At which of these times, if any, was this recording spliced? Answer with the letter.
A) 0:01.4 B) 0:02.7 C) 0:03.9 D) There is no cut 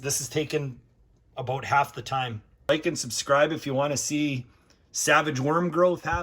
B